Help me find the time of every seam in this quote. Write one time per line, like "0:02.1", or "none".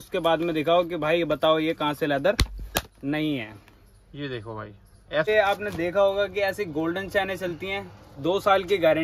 0:05.3